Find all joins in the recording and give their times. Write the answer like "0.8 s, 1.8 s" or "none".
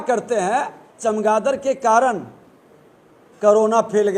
0.9 s